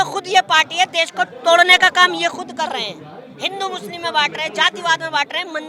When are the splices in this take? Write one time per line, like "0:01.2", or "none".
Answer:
none